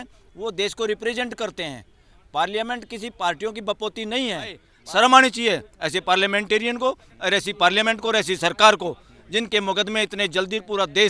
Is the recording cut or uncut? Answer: cut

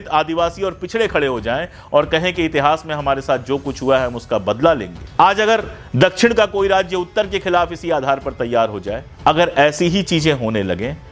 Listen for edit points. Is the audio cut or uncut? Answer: cut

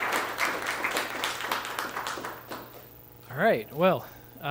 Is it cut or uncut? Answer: uncut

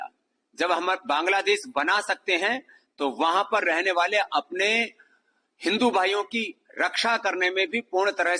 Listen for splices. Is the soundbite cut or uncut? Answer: uncut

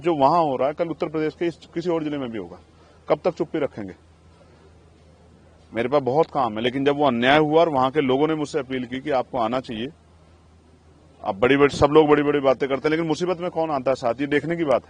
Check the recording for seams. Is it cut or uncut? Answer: uncut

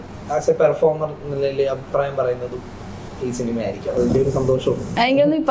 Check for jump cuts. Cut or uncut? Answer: uncut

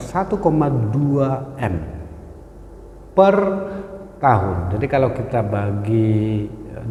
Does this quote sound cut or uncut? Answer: uncut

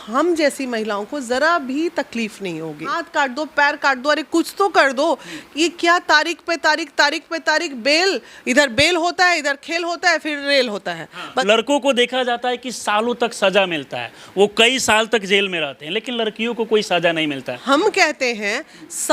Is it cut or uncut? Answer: cut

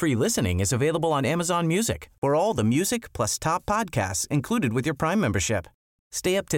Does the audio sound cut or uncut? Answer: uncut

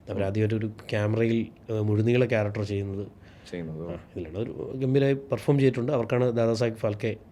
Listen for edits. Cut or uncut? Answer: uncut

